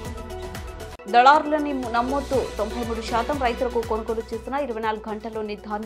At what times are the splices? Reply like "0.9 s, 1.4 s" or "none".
1.0 s